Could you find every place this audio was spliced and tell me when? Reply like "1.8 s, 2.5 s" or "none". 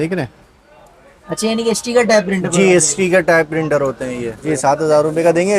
4.4 s